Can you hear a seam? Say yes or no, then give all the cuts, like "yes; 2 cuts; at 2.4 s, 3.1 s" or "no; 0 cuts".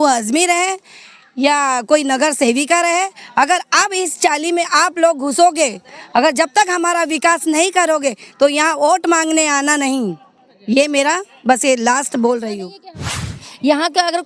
yes; 1 cut; at 13.2 s